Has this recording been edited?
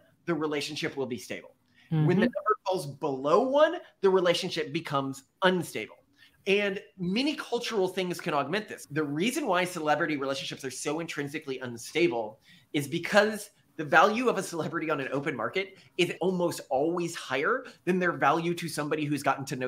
yes; 2 cuts; at 8.8 s, 16.1 s

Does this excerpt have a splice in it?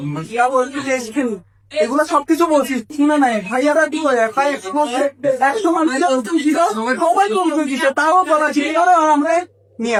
no; 0 cuts

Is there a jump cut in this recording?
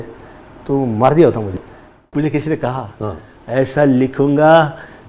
yes; 1 cut; at 1.9 s

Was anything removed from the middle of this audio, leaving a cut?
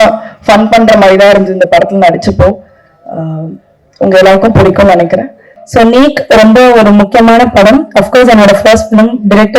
yes; 1 cut; at 5.6 s

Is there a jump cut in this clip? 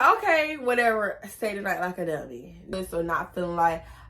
yes; 1 cut; at 2.7 s

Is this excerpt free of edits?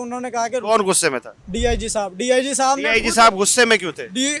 yes; 0 cuts

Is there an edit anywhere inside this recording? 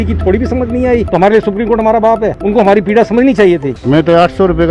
yes; 2 cuts; at 1.1 s, 3.7 s

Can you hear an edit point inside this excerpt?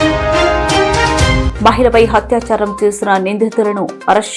yes; 1 cut; at 1.5 s

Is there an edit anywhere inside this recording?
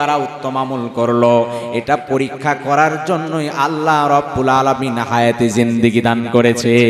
no; 0 cuts

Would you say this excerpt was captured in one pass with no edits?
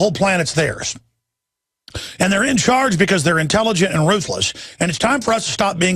yes; 0 cuts

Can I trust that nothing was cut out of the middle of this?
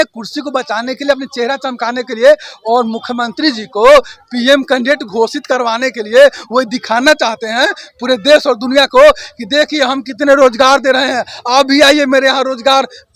yes; 0 cuts

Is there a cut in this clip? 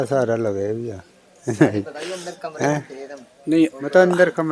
no; 0 cuts

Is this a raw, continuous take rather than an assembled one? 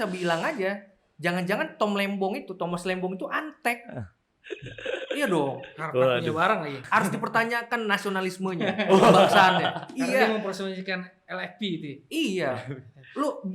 no; 1 cut; at 6.7 s

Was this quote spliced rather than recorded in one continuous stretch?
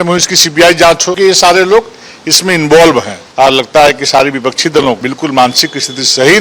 yes; 3 cuts; at 1.1 s, 3.1 s, 5.1 s

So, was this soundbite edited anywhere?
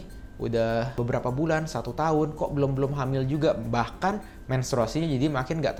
no; 0 cuts

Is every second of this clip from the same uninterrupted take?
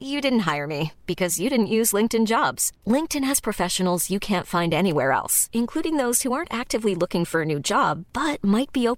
yes; 0 cuts

